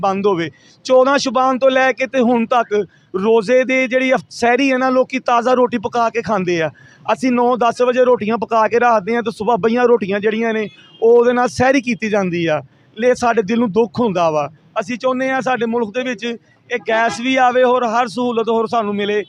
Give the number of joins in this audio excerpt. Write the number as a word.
zero